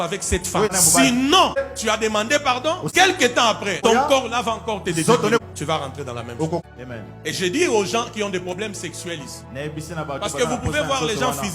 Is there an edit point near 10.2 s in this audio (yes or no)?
no